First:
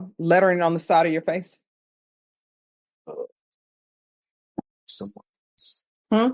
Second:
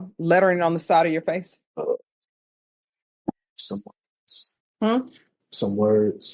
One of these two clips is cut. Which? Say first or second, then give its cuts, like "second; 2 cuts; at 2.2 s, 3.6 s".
second; 1 cut; at 1.6 s